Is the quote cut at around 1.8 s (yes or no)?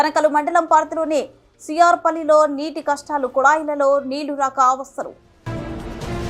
no